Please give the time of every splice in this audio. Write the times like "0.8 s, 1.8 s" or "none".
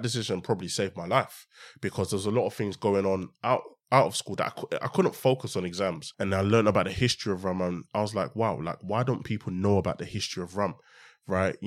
6.1 s